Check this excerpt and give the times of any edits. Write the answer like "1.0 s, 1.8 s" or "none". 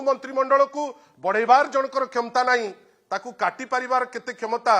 none